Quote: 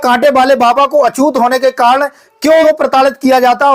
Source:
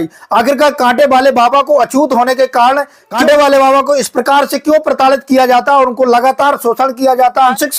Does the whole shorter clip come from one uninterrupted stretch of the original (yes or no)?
no